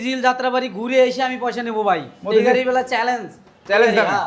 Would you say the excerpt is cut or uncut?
uncut